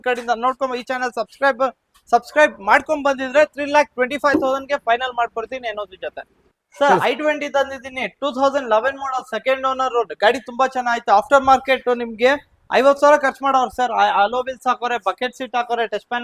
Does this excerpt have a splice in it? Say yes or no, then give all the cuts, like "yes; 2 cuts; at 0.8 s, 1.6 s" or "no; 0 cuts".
no; 0 cuts